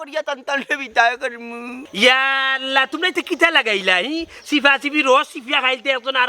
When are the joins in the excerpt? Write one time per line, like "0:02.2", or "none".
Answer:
0:01.8